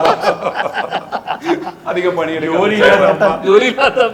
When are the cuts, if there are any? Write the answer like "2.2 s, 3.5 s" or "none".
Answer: none